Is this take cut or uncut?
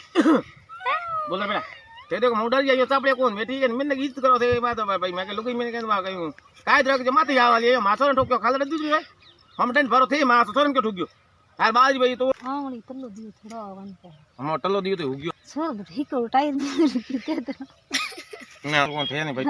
cut